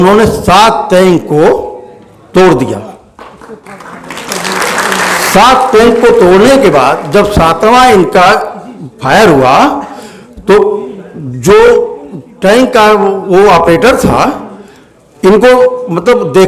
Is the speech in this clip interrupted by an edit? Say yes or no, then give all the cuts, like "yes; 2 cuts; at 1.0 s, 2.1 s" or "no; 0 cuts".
no; 0 cuts